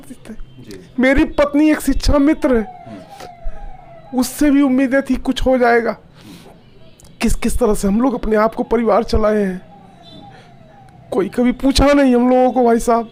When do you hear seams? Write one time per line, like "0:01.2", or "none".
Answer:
none